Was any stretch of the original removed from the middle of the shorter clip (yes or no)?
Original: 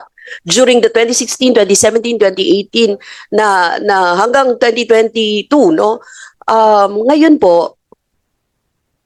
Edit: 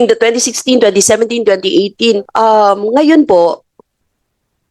yes